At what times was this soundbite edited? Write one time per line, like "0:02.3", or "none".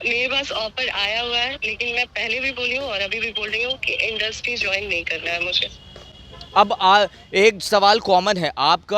none